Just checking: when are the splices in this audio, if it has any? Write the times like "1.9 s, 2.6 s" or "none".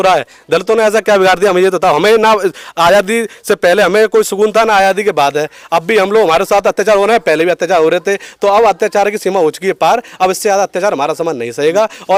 none